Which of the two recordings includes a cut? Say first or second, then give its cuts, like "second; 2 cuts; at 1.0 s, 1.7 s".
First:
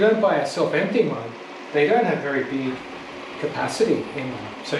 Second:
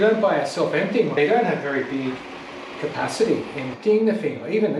second; 2 cuts; at 1.1 s, 3.7 s